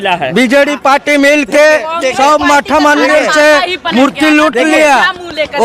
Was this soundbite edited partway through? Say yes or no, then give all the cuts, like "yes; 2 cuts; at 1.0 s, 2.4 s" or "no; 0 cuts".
no; 0 cuts